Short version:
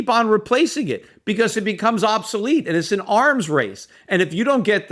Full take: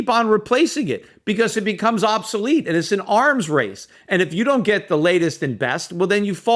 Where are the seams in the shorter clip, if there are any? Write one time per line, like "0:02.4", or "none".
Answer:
none